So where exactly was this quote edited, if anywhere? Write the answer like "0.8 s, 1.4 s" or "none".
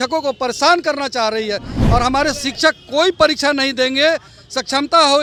none